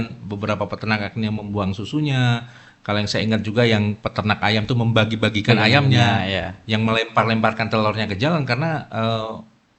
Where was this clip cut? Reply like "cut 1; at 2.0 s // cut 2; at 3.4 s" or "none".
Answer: none